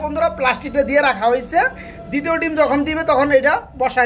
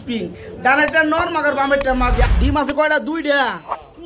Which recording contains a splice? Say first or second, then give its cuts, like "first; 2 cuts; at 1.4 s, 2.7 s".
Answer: second; 1 cut; at 2.3 s